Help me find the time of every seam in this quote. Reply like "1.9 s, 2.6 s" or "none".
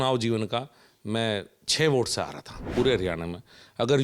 2.7 s